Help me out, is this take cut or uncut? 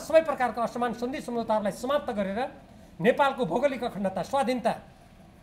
uncut